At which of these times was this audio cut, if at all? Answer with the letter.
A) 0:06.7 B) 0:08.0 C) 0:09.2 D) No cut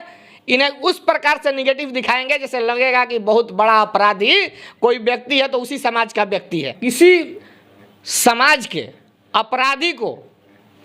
A